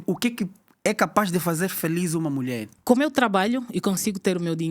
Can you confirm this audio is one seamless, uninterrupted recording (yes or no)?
no